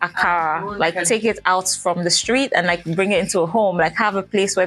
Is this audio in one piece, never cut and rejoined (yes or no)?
yes